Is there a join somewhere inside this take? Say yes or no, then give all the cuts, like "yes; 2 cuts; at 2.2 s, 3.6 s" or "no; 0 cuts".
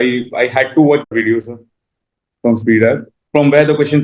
yes; 2 cuts; at 1.1 s, 3.1 s